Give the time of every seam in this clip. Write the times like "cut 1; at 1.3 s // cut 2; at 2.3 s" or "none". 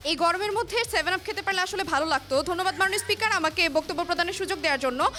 none